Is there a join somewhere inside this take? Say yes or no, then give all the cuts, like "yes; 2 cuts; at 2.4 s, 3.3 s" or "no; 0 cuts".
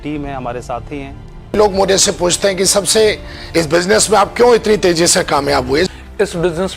yes; 2 cuts; at 1.6 s, 5.9 s